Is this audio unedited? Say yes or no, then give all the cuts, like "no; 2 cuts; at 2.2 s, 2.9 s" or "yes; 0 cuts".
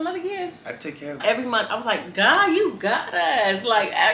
no; 1 cut; at 1.2 s